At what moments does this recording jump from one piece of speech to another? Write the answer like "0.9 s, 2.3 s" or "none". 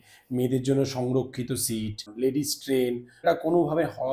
2.1 s, 3.2 s

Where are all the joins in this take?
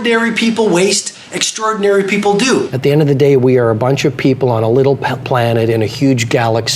2.7 s

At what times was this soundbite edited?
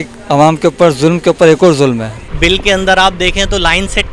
2.1 s

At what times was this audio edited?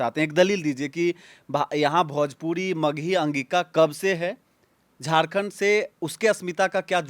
none

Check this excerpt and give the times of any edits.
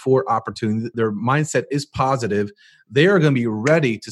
0.9 s

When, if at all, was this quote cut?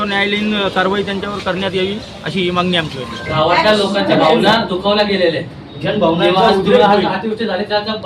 3.3 s

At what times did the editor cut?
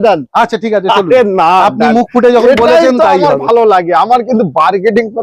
none

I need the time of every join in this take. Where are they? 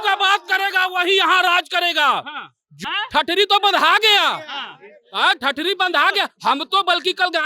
2.7 s

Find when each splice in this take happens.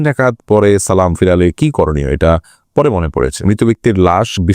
3.4 s

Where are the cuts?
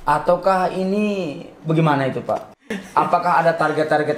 2.6 s

